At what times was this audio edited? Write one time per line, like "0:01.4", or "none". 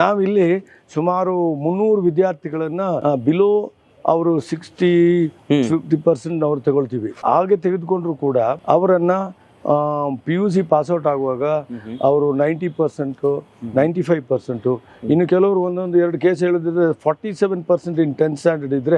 0:03.0
0:07.1
0:08.6